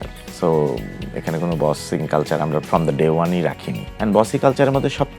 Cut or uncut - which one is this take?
uncut